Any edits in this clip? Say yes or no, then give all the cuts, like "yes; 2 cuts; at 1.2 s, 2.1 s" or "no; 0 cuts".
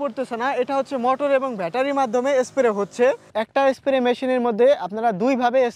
yes; 1 cut; at 3.3 s